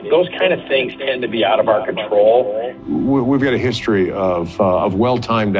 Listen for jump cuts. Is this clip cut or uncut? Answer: cut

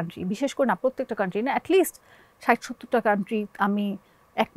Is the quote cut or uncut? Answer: uncut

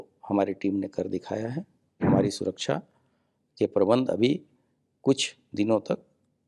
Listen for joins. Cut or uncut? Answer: cut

